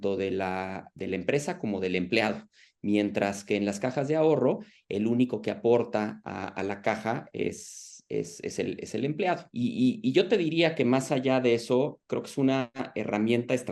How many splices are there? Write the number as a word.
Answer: one